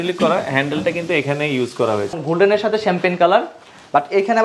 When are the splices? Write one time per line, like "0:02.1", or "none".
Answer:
0:02.2